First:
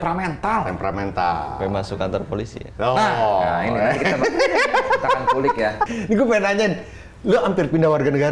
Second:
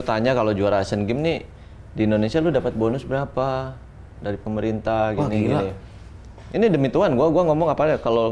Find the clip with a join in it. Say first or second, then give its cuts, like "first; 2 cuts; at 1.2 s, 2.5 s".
first; 1 cut; at 5.9 s